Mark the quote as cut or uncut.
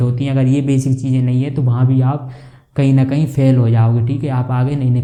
uncut